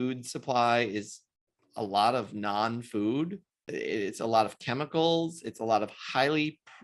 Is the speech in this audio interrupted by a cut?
yes; 1 cut; at 3.7 s

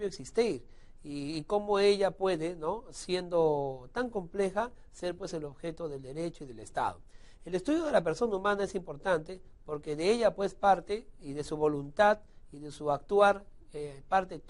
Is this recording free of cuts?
no; 1 cut; at 5.2 s

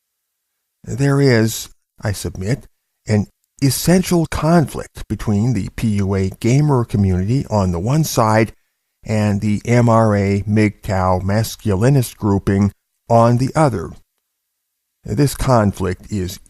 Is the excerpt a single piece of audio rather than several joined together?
no; 1 cut; at 13.4 s

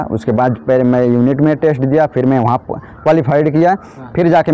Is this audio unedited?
yes; 0 cuts

